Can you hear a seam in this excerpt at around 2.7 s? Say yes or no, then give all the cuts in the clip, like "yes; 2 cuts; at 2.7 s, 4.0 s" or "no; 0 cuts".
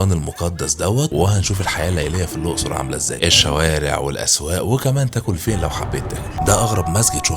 no; 1 cut; at 6.4 s